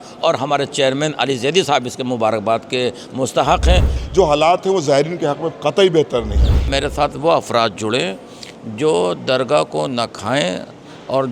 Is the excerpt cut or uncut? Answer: cut